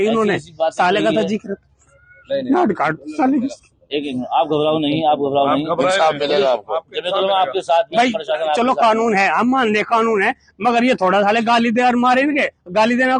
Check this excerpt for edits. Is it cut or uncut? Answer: uncut